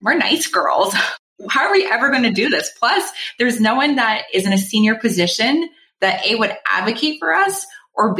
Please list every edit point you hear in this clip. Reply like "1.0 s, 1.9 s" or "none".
1.1 s